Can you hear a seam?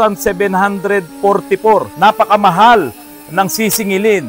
yes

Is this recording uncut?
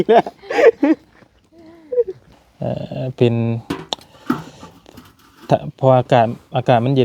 no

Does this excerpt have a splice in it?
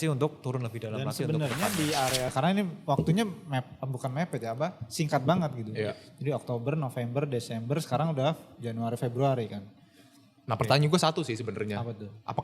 yes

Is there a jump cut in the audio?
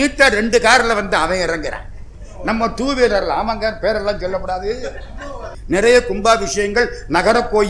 yes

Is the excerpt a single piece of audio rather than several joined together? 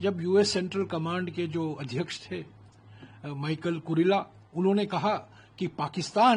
yes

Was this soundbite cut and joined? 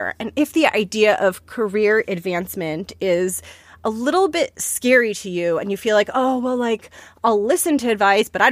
no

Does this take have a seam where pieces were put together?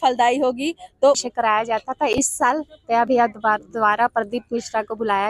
yes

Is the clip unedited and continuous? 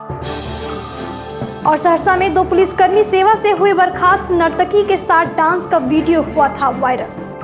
no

